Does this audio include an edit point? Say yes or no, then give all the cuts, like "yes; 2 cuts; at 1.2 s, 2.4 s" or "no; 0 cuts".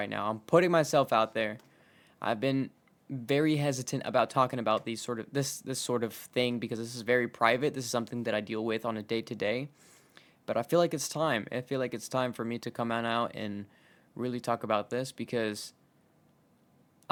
no; 0 cuts